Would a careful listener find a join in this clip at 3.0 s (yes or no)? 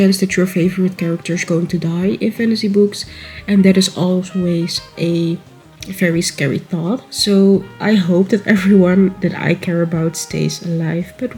no